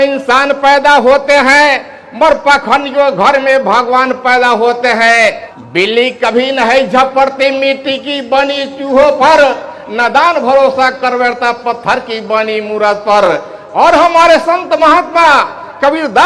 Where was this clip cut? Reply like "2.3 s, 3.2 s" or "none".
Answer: none